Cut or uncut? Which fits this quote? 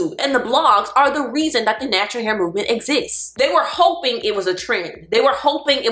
cut